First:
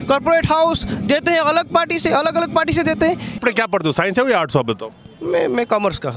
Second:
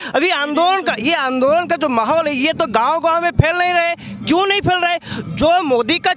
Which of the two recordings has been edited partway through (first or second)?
first